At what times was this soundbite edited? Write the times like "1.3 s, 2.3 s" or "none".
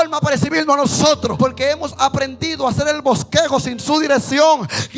1.3 s